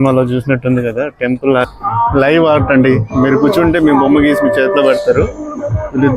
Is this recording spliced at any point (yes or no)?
yes